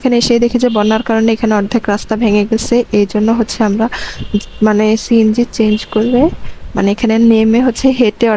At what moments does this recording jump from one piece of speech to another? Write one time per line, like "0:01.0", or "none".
none